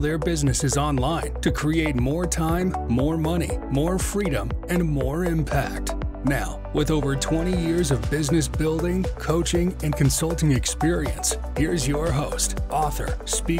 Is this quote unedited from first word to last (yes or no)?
yes